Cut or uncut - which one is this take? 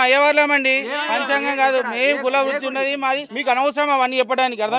cut